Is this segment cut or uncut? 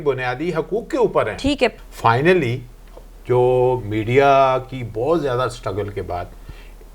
cut